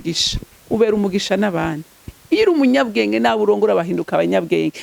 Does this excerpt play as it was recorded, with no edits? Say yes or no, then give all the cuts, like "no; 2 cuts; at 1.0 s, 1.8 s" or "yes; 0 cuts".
yes; 0 cuts